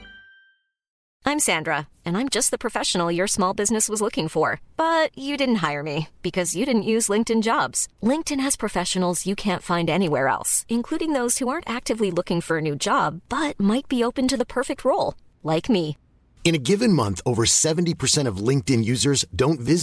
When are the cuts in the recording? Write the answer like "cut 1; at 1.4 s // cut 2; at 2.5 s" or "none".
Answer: cut 1; at 0.9 s

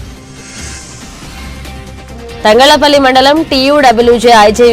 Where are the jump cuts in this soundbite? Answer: cut 1; at 1.8 s

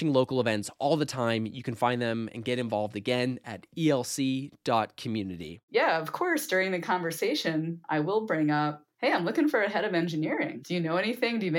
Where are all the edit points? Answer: cut 1; at 5.6 s // cut 2; at 7.8 s // cut 3; at 8.8 s // cut 4; at 10.6 s

